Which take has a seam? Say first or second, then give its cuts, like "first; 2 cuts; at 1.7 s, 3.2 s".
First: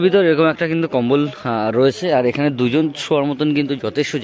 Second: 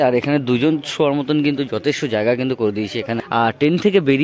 second; 1 cut; at 3.2 s